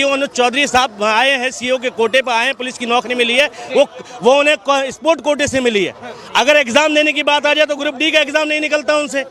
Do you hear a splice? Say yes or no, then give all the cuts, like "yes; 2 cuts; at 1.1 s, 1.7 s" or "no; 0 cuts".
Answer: no; 0 cuts